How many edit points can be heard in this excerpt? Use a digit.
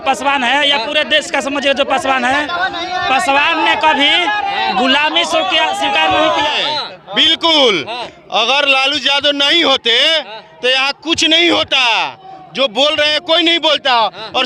1